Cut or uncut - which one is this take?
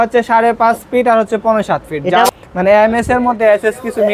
cut